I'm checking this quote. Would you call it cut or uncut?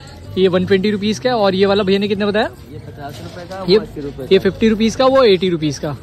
uncut